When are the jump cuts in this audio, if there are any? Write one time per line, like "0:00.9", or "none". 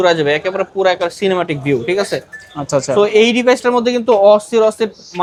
none